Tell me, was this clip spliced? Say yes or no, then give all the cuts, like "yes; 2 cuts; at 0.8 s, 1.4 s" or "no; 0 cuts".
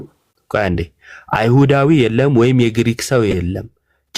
no; 0 cuts